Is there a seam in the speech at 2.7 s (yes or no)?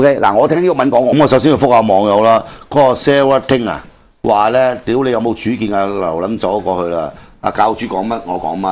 no